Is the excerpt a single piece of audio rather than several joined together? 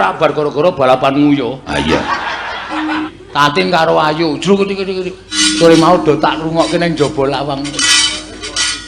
no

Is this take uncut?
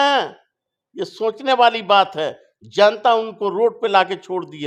yes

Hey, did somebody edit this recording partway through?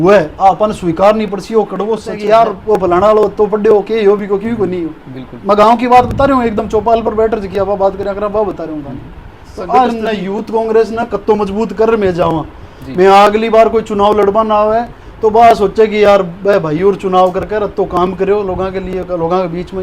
yes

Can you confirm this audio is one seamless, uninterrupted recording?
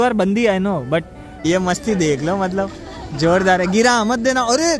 no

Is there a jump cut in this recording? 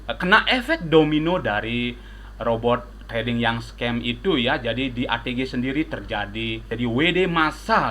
yes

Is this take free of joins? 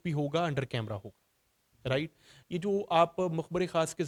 yes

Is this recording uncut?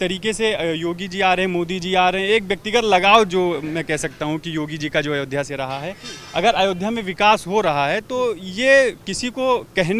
yes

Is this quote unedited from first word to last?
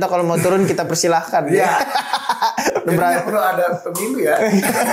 yes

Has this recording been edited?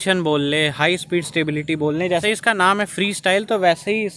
yes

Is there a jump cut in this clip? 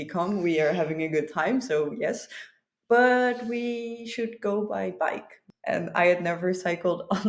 yes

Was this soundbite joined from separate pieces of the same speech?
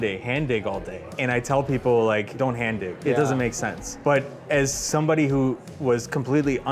yes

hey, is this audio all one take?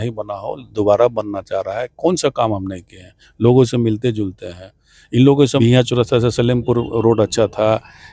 no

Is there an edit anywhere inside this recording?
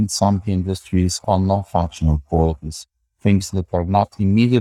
no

